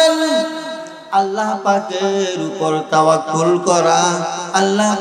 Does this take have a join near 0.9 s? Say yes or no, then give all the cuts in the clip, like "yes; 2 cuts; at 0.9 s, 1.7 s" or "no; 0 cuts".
yes; 1 cut; at 0.9 s